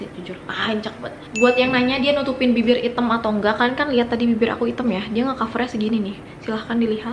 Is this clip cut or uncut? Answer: cut